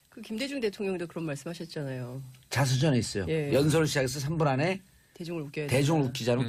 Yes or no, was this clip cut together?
no